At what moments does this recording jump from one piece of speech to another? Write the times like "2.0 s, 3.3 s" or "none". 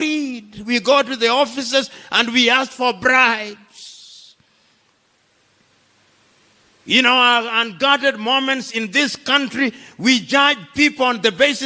none